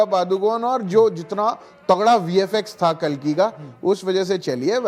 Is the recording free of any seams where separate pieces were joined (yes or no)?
yes